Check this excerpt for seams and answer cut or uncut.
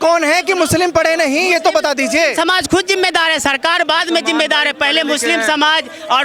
uncut